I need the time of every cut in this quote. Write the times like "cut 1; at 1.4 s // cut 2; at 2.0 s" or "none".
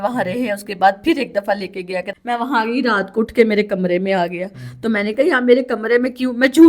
cut 1; at 2.1 s